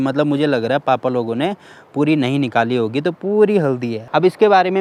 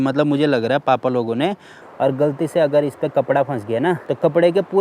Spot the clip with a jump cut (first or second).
second